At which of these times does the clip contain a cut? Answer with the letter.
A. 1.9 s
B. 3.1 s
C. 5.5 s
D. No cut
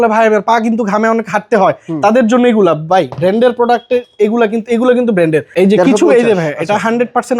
C